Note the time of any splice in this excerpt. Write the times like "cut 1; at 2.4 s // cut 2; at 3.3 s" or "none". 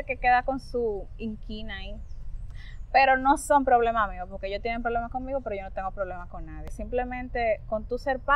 cut 1; at 6.8 s